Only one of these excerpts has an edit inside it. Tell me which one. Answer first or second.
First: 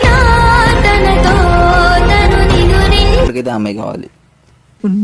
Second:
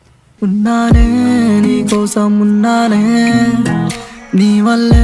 first